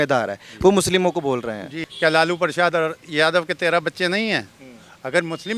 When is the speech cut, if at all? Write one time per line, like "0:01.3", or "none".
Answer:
0:01.8